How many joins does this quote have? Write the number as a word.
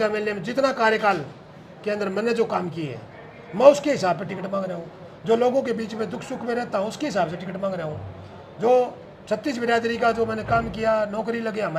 zero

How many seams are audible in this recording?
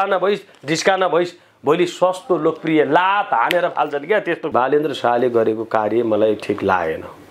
one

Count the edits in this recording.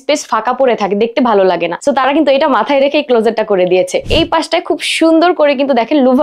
two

